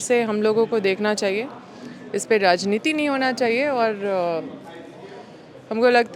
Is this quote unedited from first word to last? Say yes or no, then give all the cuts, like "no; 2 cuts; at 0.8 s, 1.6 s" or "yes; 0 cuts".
yes; 0 cuts